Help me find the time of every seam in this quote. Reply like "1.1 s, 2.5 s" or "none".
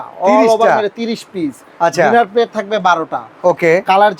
none